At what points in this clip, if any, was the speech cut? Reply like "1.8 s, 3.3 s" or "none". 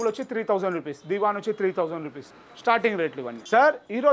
none